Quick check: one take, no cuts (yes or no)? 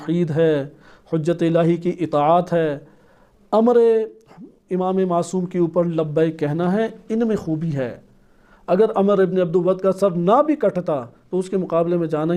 yes